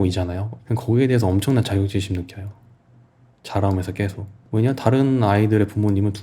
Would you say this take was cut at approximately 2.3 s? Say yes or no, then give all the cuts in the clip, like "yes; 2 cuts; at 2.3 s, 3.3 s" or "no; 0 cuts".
no; 1 cut; at 4.3 s